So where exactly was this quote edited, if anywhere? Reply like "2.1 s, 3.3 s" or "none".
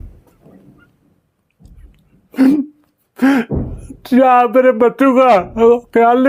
none

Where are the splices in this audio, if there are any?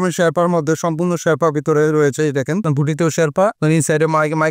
2.6 s, 3.6 s

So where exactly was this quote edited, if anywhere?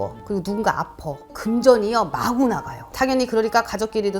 1.4 s, 2.9 s

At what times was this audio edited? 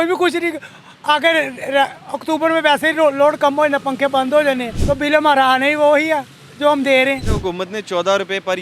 4.7 s, 7.3 s

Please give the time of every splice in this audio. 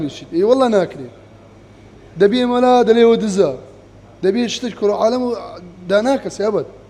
none

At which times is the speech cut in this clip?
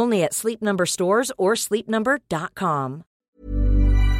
3.2 s

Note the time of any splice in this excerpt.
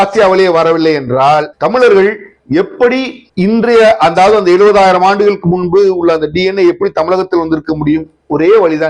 none

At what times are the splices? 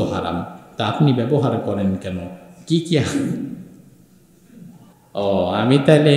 5.0 s

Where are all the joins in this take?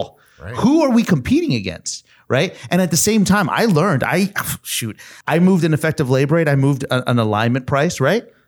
5.1 s

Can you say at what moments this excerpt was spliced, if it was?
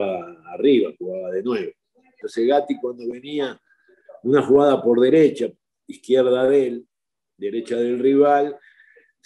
2.2 s

